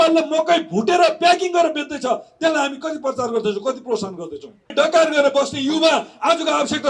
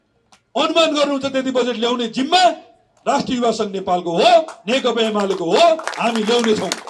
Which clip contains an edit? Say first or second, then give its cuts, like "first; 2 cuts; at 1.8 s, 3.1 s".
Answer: first; 1 cut; at 4.7 s